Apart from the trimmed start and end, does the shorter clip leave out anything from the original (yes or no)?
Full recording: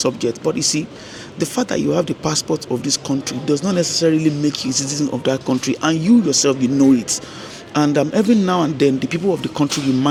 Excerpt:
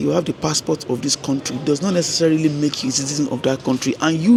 no